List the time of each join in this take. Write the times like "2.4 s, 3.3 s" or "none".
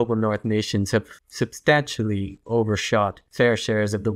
1.2 s, 3.2 s